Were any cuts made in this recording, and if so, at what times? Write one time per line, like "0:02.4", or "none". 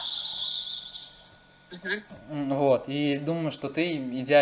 none